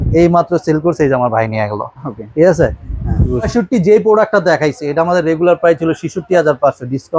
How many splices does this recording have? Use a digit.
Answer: 0